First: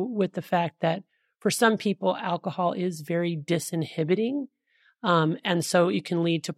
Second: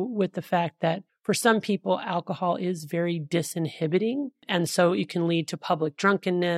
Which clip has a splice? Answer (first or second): second